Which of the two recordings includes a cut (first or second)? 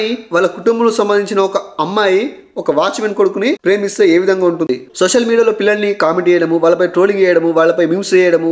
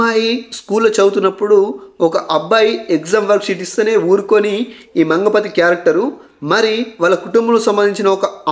first